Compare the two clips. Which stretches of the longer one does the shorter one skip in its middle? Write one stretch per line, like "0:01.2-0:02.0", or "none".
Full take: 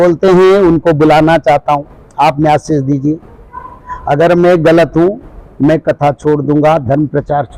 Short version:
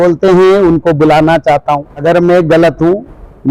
0:01.9-0:04.1